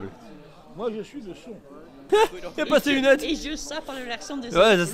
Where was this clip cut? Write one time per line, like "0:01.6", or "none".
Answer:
0:01.9